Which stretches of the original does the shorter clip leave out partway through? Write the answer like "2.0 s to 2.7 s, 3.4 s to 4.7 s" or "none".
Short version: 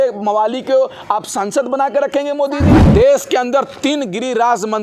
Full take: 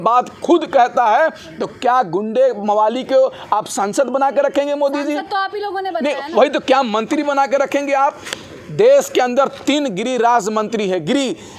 5.3 s to 8.7 s